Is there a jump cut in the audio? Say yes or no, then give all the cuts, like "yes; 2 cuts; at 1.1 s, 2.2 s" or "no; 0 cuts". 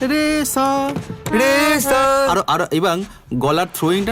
no; 0 cuts